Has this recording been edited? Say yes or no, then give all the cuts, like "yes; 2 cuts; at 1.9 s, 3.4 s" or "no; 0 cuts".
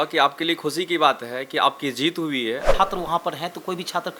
yes; 1 cut; at 2.7 s